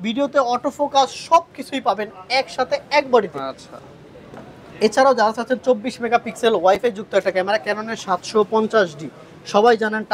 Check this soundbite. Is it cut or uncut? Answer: uncut